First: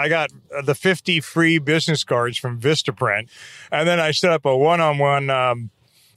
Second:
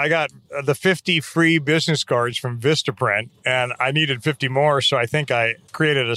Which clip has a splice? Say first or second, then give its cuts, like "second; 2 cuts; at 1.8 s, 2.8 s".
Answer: first; 1 cut; at 3.3 s